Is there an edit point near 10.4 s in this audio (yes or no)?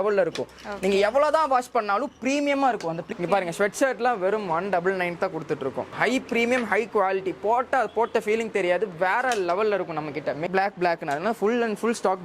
yes